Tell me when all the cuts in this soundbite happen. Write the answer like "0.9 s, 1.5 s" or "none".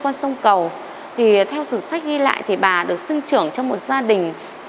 none